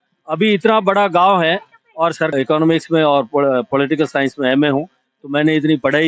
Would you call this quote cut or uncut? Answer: cut